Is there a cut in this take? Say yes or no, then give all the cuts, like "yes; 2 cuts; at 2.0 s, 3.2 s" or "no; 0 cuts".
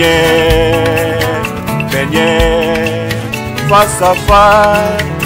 no; 0 cuts